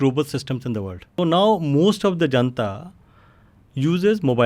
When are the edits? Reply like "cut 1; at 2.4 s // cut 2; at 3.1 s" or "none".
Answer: cut 1; at 1.1 s